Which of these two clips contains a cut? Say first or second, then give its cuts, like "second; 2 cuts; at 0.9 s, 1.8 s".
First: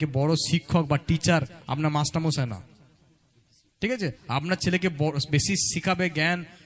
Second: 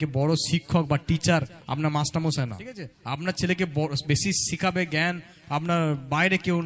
second; 1 cut; at 2.9 s